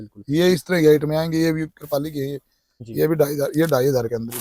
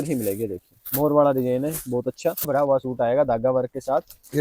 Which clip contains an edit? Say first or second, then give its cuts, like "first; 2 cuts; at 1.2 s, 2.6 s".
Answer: second; 1 cut; at 2.5 s